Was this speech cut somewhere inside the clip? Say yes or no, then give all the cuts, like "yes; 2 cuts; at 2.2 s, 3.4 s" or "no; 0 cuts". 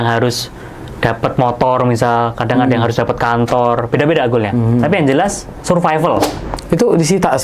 yes; 1 cut; at 6.5 s